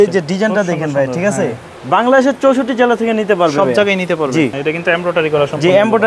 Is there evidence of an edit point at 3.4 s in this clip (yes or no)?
no